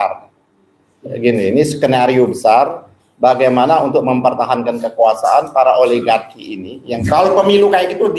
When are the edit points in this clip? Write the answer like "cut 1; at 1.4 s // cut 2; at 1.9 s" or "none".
cut 1; at 7.0 s